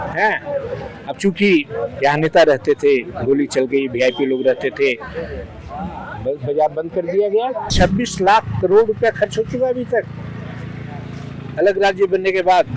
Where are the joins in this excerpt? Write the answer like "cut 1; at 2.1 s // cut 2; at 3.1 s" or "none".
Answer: cut 1; at 7.7 s